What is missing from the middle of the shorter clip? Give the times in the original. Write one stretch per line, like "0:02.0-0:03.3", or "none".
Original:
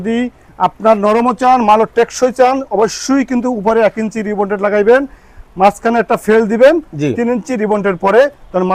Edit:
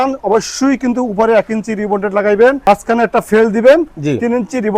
0:05.1-0:05.6